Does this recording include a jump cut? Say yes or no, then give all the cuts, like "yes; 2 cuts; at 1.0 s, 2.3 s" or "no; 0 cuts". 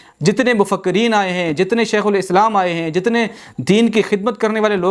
no; 0 cuts